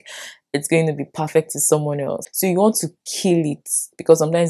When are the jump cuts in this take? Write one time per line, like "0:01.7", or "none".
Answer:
0:02.2